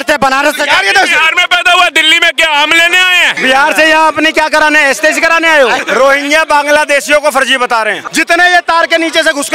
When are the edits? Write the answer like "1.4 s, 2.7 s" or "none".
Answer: 3.3 s, 5.8 s, 8.0 s